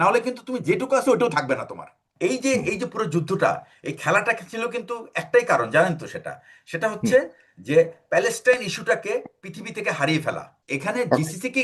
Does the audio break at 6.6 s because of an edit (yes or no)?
no